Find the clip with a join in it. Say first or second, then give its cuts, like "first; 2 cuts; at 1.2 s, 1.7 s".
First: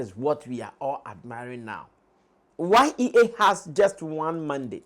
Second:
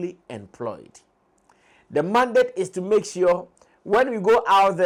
first; 1 cut; at 2.4 s